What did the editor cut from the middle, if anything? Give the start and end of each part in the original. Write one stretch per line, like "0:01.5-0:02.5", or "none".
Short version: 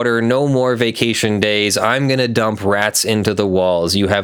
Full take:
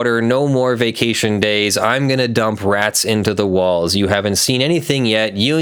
none